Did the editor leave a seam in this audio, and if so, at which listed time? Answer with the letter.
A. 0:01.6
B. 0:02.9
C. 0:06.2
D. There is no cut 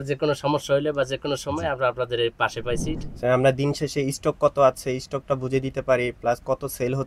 B